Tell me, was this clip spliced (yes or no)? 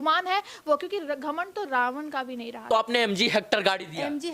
yes